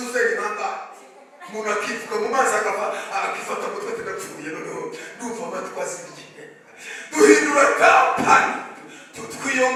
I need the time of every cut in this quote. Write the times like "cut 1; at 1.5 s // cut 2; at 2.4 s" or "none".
none